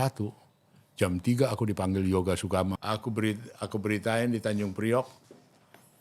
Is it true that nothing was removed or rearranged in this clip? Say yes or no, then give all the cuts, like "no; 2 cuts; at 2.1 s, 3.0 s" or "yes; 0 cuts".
no; 1 cut; at 2.8 s